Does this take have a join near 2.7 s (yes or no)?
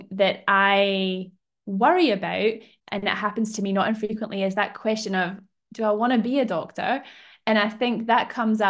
yes